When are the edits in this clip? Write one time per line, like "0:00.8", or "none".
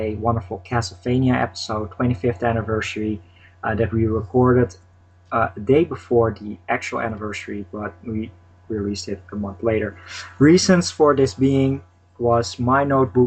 none